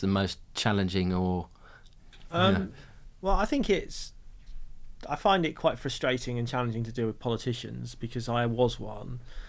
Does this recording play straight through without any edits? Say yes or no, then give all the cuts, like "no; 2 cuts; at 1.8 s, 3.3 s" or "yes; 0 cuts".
yes; 0 cuts